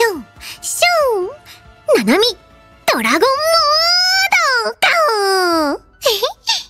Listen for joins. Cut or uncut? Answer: uncut